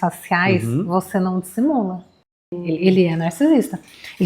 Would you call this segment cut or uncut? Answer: cut